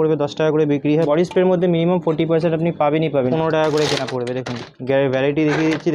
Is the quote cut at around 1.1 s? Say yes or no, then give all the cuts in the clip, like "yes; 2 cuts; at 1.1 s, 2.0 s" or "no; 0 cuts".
yes; 2 cuts; at 1.1 s, 3.3 s